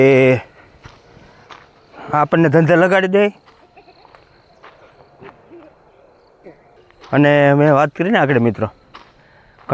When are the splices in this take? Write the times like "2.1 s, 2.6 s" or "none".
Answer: 6.8 s